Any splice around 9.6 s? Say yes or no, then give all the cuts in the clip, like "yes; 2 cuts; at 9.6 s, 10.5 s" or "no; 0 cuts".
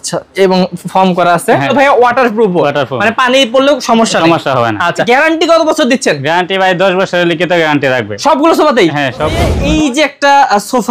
yes; 3 cuts; at 1.7 s, 5.1 s, 9.6 s